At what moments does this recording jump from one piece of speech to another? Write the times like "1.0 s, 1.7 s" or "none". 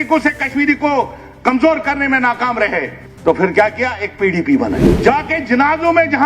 3.0 s, 4.9 s